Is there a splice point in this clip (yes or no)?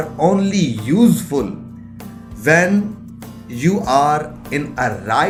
no